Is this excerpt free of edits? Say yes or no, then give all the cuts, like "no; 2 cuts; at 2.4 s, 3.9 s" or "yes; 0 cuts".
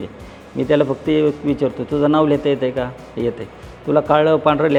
yes; 0 cuts